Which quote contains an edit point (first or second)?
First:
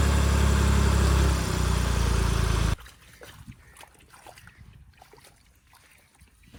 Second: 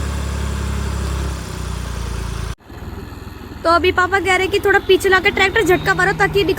second